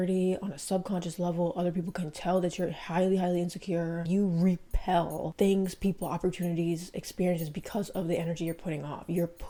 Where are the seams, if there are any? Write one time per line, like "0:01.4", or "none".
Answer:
none